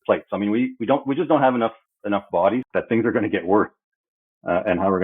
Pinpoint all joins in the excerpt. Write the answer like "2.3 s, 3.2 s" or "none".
2.7 s